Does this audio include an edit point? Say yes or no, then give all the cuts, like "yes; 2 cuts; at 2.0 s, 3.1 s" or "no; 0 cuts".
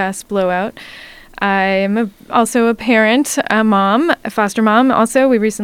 yes; 1 cut; at 4.2 s